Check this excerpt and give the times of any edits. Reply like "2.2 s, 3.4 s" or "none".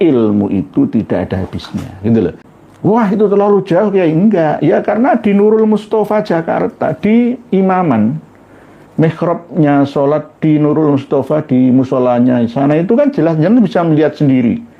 2.5 s